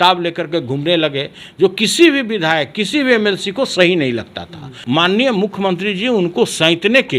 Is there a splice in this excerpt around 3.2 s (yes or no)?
no